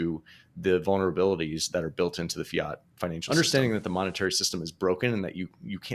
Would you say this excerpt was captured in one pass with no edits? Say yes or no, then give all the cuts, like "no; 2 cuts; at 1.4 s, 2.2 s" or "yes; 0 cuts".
no; 1 cut; at 3.2 s